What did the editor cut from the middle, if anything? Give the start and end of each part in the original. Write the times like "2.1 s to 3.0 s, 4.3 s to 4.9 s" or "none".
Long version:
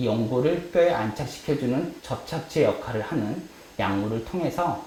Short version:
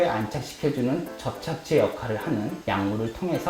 3.4 s to 3.7 s